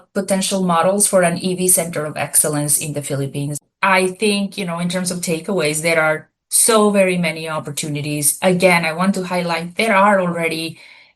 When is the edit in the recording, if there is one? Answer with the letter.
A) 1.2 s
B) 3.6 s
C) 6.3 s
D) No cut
B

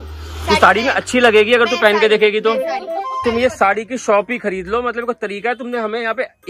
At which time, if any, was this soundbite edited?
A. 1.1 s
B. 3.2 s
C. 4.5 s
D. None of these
B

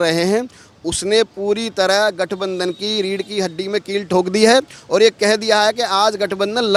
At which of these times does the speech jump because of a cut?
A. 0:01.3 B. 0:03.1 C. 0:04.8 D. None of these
D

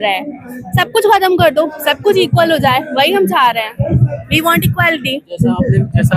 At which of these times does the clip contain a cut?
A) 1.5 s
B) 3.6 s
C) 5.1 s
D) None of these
D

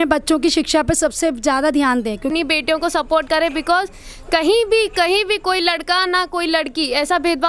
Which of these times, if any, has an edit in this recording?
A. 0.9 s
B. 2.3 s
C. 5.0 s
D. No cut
B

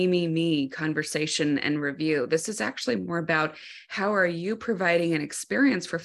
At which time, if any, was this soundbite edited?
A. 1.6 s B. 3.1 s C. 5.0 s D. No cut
D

